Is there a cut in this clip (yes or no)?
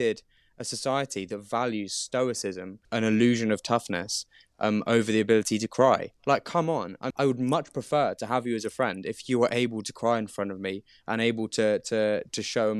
yes